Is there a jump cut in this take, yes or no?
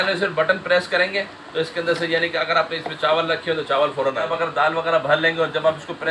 yes